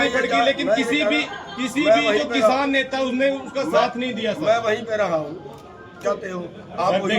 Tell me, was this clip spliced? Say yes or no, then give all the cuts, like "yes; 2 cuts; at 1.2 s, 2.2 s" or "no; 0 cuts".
yes; 1 cut; at 6.0 s